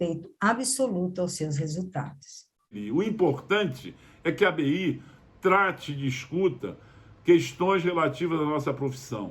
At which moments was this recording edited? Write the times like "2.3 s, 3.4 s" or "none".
2.7 s